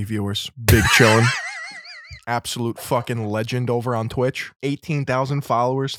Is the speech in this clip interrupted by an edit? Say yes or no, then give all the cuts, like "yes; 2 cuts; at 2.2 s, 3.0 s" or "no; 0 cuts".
yes; 1 cut; at 4.5 s